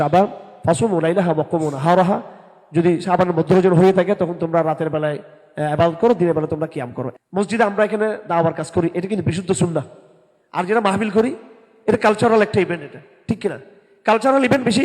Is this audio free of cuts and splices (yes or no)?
no